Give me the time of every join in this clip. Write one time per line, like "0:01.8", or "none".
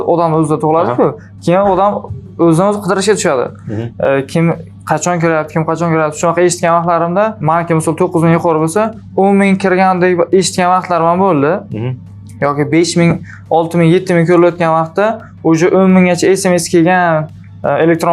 none